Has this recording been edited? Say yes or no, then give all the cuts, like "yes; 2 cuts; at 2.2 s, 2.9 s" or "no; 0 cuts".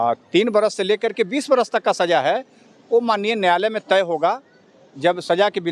no; 0 cuts